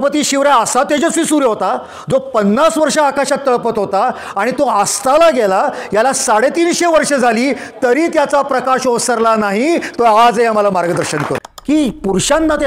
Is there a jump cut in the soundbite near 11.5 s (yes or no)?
yes